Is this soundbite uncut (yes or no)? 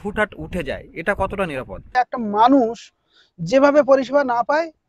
no